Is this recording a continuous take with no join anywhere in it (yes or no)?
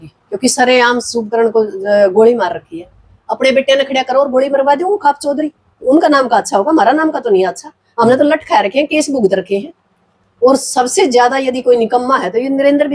yes